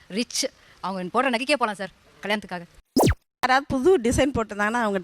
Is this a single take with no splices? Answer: no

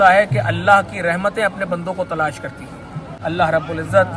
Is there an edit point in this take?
yes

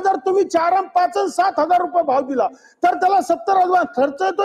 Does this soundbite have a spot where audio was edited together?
no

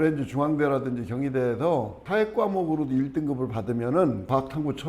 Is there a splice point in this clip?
no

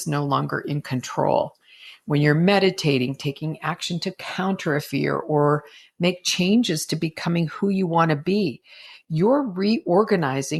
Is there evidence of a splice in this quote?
no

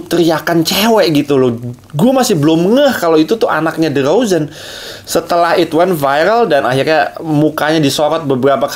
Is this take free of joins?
no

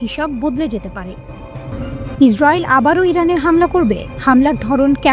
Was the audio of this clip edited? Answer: yes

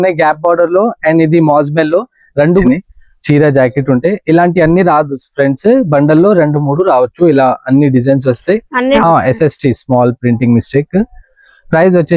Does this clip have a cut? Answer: yes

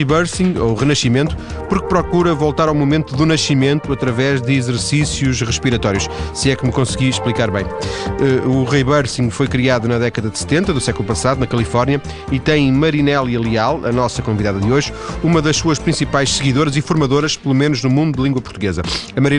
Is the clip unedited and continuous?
yes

